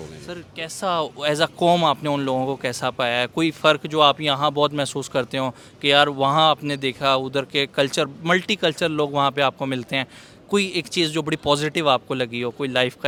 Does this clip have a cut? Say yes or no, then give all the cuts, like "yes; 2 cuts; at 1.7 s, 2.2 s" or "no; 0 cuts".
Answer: no; 0 cuts